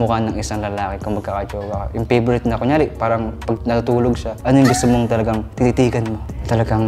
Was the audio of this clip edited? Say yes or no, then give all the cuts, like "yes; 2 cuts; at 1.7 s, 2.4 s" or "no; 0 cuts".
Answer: no; 0 cuts